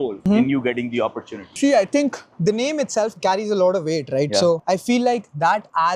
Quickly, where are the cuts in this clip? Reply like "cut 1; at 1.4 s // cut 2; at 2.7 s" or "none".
none